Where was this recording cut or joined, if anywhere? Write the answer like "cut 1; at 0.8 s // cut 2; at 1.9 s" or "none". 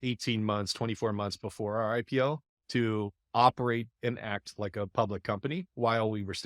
cut 1; at 4.9 s